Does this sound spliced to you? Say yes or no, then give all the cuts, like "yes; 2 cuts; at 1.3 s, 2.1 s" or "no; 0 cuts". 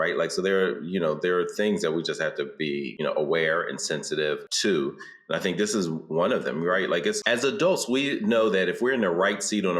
yes; 3 cuts; at 2.9 s, 4.5 s, 7.2 s